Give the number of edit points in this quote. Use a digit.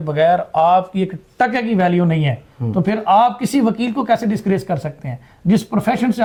0